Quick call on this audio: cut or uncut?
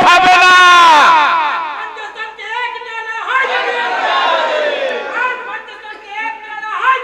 uncut